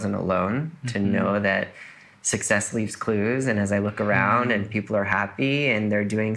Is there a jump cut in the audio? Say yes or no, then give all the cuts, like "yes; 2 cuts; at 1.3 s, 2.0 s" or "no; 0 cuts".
no; 0 cuts